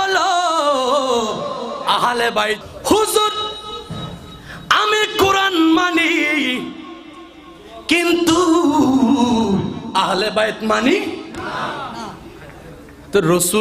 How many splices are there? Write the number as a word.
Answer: one